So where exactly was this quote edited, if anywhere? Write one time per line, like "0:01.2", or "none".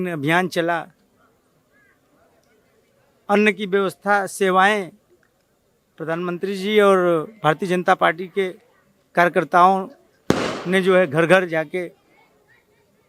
none